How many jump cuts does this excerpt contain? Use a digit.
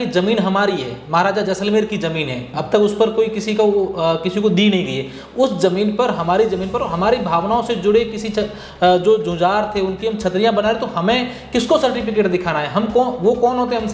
0